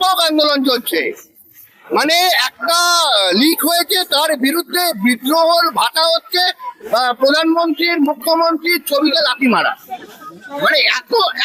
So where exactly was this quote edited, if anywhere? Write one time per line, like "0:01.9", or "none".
none